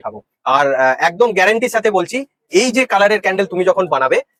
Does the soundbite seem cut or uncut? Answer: uncut